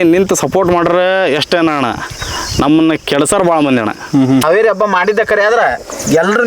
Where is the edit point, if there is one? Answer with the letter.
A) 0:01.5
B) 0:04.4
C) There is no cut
B